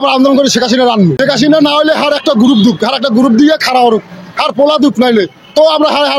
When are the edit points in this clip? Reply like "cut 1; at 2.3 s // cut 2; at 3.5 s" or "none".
cut 1; at 1.2 s